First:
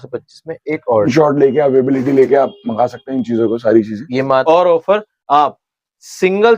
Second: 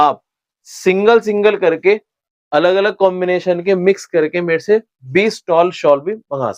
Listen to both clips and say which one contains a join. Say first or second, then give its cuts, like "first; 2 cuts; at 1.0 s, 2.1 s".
first; 2 cuts; at 1.1 s, 4.4 s